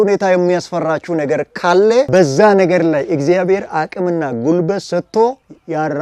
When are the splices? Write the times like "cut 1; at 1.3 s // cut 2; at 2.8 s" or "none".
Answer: none